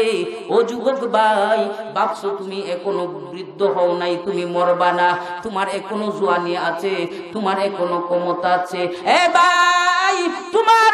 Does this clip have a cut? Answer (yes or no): no